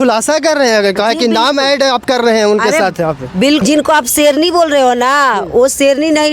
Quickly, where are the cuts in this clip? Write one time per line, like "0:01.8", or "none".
0:03.6